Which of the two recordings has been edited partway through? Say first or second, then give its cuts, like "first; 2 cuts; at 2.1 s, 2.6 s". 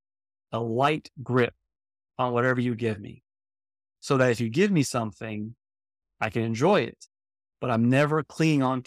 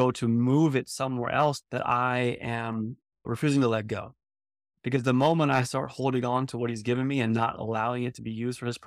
second; 1 cut; at 1.6 s